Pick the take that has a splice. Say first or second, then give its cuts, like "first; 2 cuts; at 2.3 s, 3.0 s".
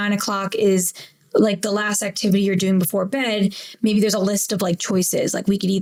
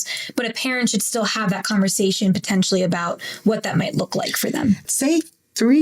second; 1 cut; at 4.9 s